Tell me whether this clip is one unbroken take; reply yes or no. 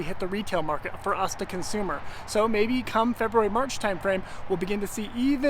yes